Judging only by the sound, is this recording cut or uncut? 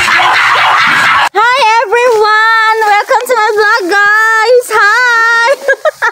uncut